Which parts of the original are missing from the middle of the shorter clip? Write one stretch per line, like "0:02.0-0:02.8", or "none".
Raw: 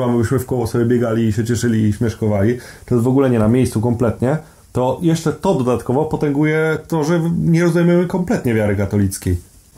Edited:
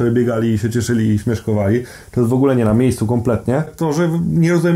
0:04.5-0:06.8